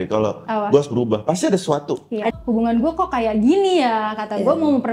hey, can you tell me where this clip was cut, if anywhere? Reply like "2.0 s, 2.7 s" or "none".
2.3 s